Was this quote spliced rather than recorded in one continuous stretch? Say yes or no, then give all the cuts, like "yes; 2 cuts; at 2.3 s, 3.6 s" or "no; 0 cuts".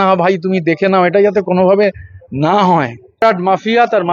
yes; 1 cut; at 3.2 s